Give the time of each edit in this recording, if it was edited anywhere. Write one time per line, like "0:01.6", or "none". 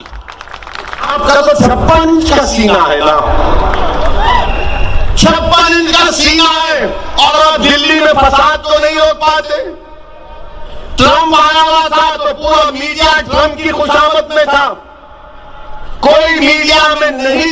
0:01.1